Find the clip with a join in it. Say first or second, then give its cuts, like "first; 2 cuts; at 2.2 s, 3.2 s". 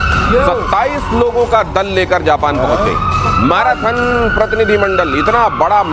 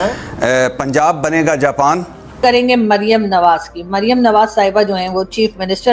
second; 1 cut; at 2.4 s